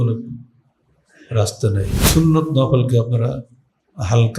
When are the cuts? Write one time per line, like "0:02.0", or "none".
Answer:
0:02.0

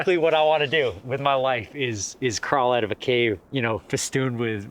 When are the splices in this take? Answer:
0:03.4

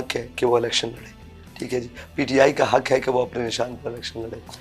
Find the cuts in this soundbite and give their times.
none

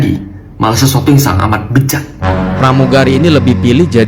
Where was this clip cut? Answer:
0:02.4

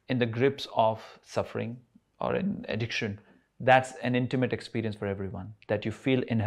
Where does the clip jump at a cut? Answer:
none

